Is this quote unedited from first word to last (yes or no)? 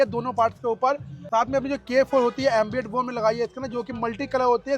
no